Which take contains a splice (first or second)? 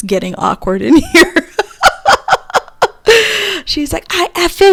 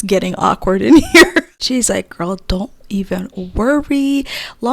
second